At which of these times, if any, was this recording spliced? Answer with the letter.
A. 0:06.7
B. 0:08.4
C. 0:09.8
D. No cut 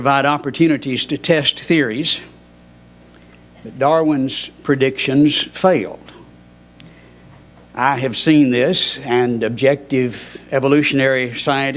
A